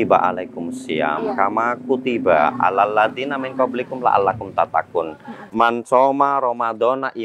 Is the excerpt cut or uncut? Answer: cut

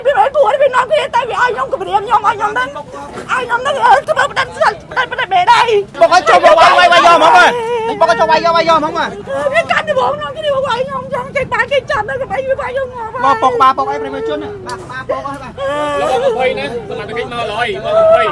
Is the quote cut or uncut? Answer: cut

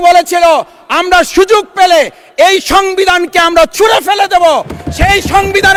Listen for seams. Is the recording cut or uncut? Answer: uncut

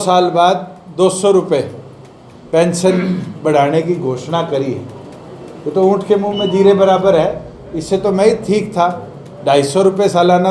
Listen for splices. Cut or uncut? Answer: uncut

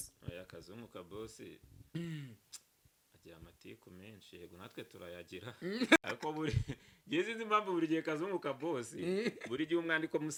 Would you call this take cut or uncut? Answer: uncut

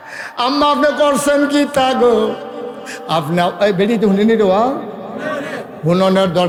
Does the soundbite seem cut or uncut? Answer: uncut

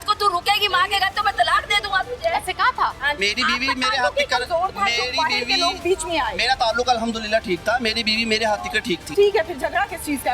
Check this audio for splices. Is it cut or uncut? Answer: cut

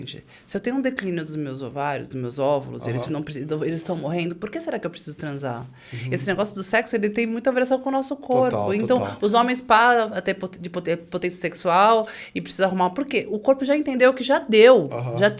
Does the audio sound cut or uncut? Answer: uncut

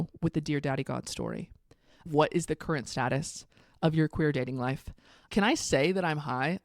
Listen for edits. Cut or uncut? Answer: cut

